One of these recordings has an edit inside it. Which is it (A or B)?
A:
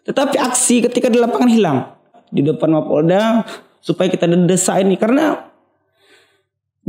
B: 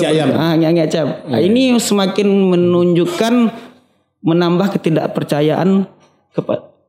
A